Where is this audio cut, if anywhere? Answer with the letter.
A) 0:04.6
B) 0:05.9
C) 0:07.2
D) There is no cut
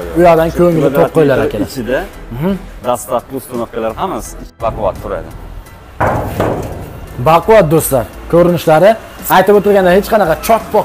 A